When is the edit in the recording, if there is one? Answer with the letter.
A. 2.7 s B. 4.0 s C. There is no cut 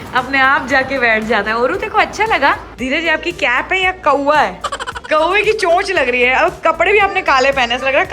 A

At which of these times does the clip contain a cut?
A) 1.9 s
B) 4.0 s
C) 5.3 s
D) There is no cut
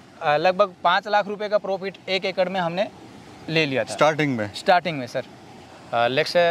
C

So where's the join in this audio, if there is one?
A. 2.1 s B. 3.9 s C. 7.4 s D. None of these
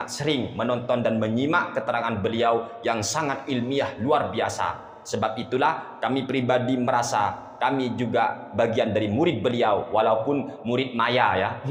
D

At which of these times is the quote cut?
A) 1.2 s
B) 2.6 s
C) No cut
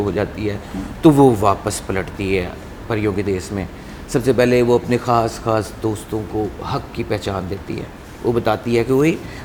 C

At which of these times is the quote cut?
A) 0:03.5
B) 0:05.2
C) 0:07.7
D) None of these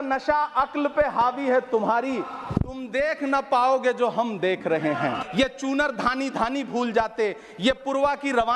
B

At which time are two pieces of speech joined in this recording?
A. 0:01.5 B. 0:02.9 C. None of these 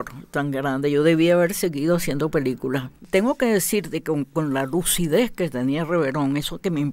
B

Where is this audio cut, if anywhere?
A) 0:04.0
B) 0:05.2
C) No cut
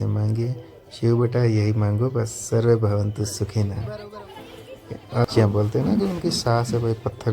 B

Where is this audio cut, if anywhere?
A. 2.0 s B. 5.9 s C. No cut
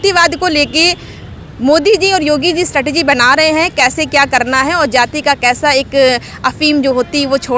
C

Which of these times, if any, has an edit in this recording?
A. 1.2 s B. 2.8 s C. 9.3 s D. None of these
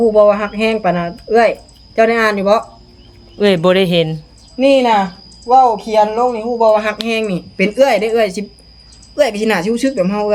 D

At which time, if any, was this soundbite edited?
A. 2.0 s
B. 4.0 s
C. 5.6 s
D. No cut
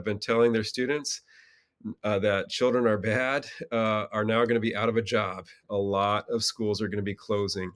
C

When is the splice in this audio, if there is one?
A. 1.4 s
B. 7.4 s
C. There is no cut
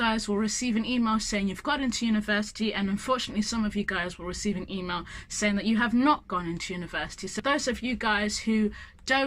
B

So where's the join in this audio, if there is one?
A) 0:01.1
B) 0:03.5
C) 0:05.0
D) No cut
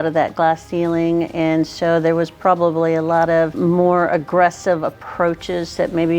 B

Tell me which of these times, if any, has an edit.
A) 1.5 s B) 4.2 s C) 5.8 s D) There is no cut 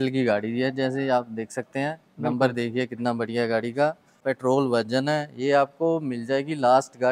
B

